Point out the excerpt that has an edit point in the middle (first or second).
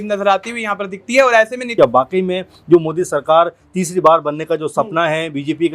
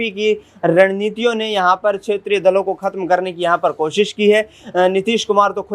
first